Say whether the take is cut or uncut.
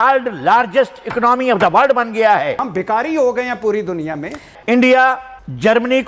cut